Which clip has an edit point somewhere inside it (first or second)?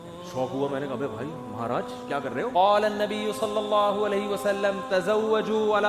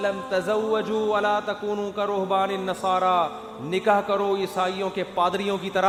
first